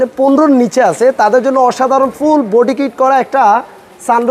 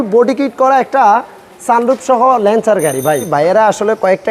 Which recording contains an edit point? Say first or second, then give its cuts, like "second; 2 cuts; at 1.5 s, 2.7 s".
second; 1 cut; at 3.2 s